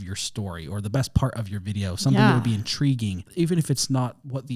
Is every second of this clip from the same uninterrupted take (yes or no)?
yes